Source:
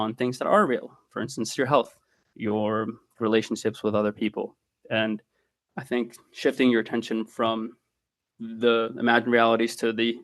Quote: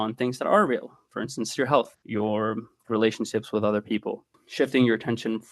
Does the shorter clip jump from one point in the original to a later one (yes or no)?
yes